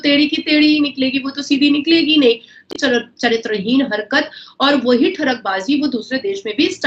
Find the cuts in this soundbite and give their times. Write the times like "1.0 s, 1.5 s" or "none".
2.7 s